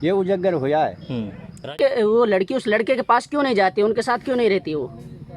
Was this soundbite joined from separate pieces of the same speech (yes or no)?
yes